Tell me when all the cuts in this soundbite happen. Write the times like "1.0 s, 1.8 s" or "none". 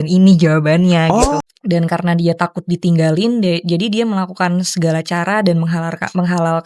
1.3 s